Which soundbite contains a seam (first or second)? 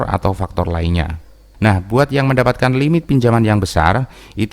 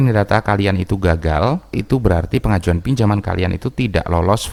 first